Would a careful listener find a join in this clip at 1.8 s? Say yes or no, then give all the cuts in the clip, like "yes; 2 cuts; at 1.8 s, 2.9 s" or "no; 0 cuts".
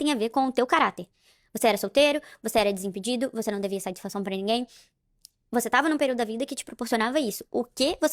yes; 1 cut; at 1.8 s